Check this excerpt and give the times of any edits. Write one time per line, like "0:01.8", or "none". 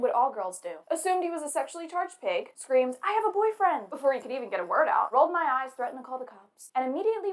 0:05.2